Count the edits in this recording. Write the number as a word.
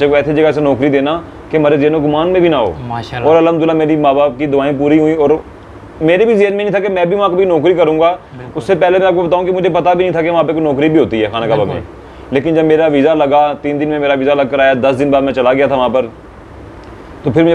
zero